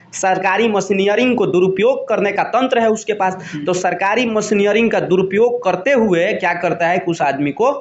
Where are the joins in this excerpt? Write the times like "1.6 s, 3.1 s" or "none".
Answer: none